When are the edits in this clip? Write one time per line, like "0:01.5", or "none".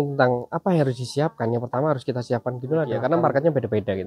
0:03.0